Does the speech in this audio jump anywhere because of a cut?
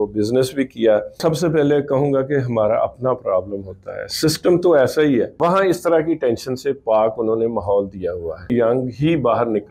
yes; 3 cuts; at 1.2 s, 5.3 s, 8.5 s

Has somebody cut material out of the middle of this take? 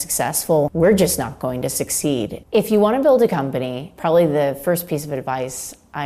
yes; 1 cut; at 2.4 s

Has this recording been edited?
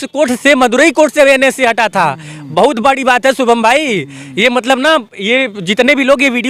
no; 0 cuts

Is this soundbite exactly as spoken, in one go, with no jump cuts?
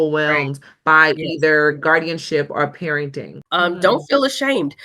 no; 1 cut; at 3.3 s

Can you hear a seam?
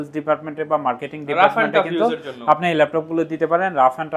no; 0 cuts

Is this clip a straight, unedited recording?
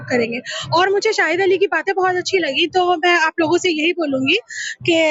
yes; 0 cuts

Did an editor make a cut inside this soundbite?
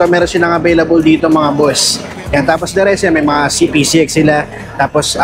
no; 0 cuts

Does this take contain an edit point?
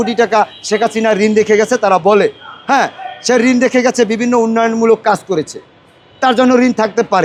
no; 0 cuts

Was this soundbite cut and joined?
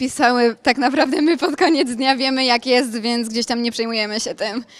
no; 0 cuts

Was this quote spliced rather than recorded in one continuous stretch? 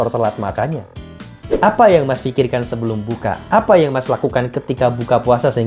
yes; 1 cut; at 1.4 s

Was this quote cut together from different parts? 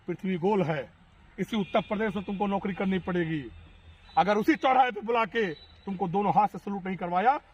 no; 0 cuts

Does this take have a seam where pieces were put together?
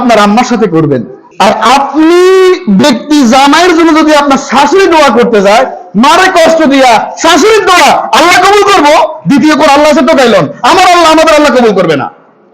yes; 1 cut; at 1.2 s

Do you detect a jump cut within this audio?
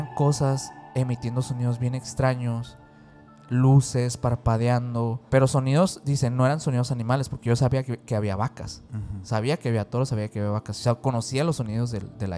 yes; 1 cut; at 5.2 s

